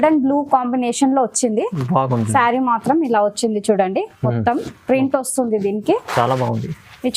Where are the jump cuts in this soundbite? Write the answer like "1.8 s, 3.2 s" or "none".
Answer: none